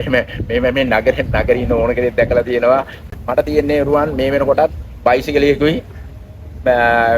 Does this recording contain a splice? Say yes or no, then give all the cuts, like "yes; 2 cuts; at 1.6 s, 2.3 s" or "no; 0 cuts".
yes; 1 cut; at 3.0 s